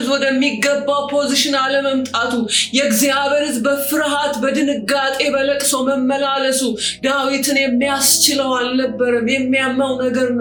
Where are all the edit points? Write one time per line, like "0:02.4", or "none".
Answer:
none

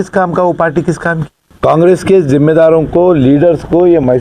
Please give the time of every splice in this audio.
0:01.4

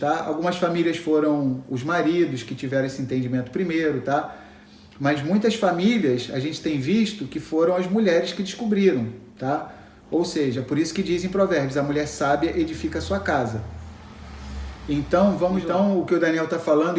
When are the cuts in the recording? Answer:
0:15.6

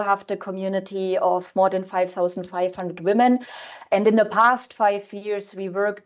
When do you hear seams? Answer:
none

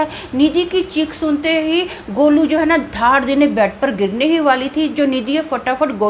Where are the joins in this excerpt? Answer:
none

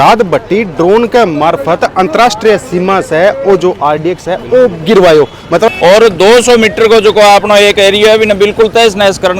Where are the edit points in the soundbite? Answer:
0:05.8

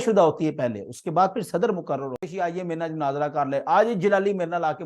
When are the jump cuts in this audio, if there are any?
0:02.2

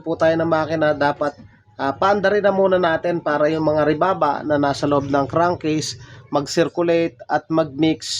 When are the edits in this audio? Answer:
none

